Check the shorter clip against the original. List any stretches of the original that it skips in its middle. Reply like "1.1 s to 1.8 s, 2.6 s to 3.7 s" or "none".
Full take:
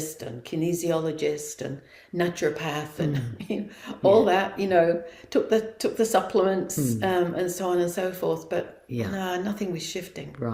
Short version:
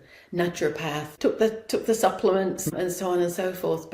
2.9 s to 5.2 s, 6.8 s to 7.3 s